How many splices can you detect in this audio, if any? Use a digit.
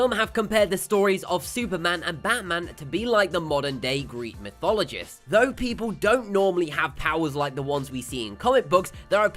0